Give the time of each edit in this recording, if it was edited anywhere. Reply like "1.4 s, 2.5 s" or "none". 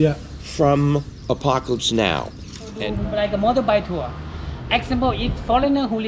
2.8 s